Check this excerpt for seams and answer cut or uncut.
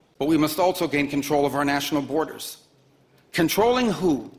uncut